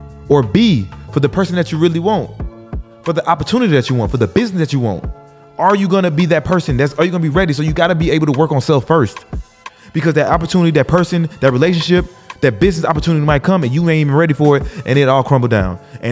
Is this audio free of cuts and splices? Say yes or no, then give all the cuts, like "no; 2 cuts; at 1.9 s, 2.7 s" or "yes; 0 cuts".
yes; 0 cuts